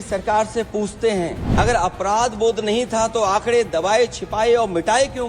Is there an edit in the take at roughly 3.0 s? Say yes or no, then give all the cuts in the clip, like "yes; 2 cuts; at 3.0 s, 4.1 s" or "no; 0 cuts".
no; 1 cut; at 1.4 s